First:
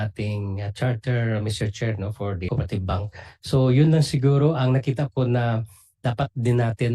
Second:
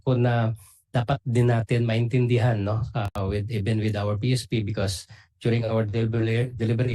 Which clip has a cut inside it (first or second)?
first